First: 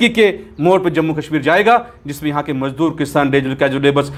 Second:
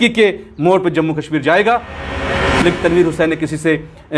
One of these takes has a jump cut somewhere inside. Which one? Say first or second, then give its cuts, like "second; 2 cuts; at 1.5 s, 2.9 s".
second; 1 cut; at 2.4 s